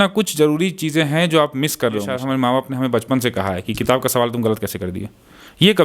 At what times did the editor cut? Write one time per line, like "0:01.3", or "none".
0:02.1